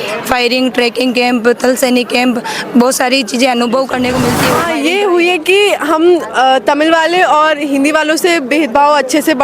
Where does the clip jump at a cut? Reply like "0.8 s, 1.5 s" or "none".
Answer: 4.6 s